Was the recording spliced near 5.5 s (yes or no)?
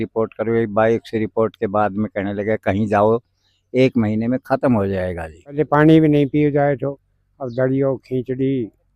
yes